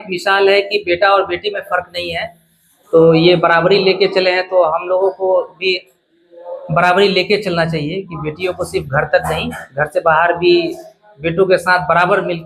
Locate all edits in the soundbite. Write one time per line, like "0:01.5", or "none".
none